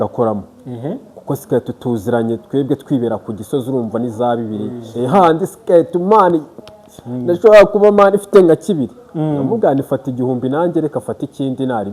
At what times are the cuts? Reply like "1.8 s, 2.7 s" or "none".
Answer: 4.8 s